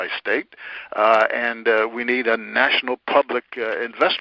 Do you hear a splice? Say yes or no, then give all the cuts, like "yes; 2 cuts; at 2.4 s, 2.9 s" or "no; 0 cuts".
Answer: no; 0 cuts